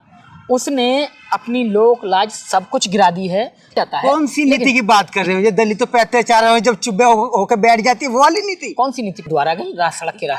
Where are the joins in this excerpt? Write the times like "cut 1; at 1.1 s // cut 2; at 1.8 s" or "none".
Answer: cut 1; at 3.8 s // cut 2; at 9.3 s